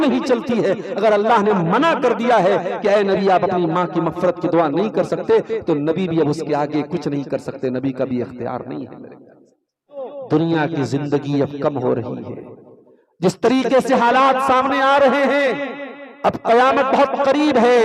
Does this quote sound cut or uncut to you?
cut